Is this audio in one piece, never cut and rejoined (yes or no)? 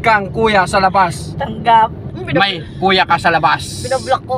no